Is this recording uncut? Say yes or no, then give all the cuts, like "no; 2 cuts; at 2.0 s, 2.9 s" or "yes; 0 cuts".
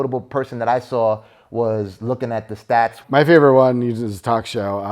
no; 1 cut; at 3.0 s